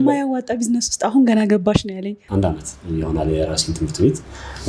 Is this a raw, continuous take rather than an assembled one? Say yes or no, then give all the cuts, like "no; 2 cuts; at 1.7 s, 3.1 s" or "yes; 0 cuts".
no; 1 cut; at 2.2 s